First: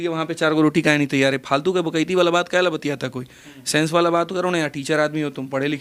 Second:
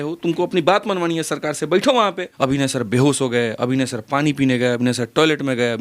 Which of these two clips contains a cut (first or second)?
second